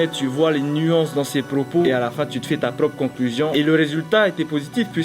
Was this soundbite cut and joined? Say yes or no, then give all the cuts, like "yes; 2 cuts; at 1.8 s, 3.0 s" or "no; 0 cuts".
yes; 2 cuts; at 1.9 s, 3.5 s